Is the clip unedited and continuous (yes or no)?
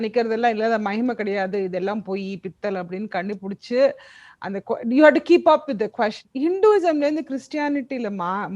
no